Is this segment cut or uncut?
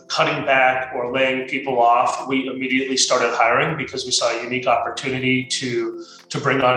uncut